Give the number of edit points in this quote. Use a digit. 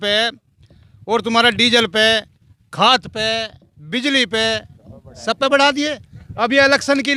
0